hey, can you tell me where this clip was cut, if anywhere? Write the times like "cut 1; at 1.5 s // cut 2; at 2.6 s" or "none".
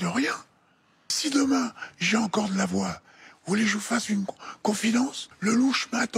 cut 1; at 1.2 s // cut 2; at 5.2 s